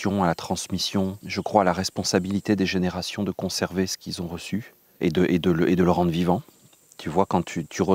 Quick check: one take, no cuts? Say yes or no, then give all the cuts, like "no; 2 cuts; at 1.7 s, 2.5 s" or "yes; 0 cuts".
no; 2 cuts; at 1.2 s, 4.8 s